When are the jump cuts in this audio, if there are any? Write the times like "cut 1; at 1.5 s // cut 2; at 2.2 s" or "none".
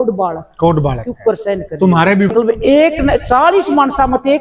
cut 1; at 2.3 s